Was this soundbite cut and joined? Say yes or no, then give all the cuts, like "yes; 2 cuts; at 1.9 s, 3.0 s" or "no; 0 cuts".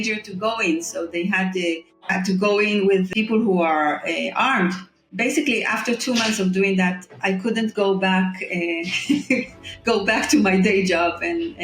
yes; 3 cuts; at 2.0 s, 3.1 s, 5.1 s